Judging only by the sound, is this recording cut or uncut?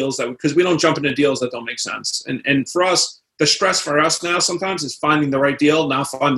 uncut